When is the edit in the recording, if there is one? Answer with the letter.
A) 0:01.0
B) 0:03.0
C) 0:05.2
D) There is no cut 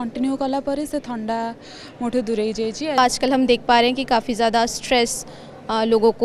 B